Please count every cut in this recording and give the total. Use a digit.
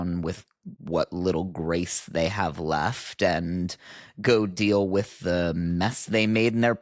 0